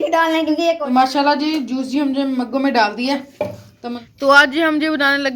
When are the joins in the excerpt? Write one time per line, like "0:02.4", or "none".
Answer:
0:00.8
0:04.0